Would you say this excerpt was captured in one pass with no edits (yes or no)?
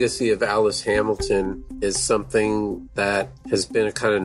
no